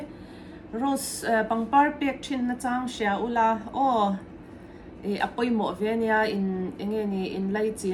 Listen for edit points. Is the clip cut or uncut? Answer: uncut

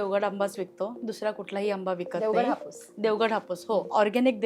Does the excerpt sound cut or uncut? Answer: uncut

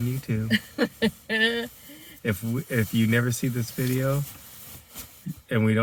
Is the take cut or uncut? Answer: uncut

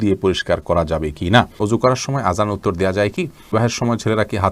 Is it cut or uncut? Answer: cut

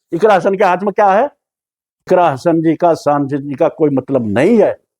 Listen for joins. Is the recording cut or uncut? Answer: cut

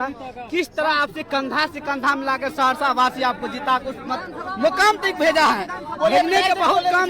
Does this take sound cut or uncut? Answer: uncut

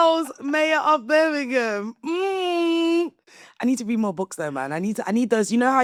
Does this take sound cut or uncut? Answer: uncut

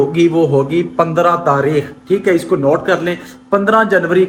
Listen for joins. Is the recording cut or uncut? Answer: uncut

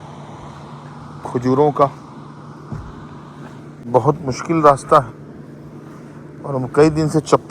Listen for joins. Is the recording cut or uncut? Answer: cut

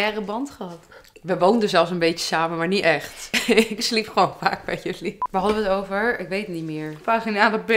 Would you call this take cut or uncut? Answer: cut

